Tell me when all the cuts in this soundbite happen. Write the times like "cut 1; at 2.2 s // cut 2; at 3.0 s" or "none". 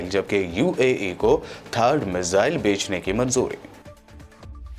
none